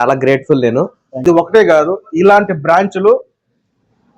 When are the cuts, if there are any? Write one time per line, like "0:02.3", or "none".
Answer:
0:01.2